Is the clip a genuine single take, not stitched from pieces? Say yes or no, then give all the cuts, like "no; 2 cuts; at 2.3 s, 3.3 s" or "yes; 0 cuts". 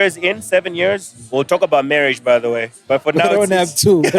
no; 2 cuts; at 1.1 s, 2.7 s